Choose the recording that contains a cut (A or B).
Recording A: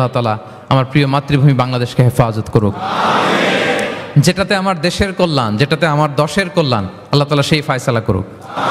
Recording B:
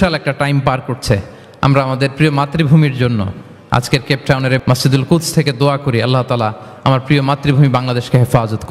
B